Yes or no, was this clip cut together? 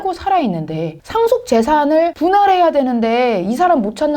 yes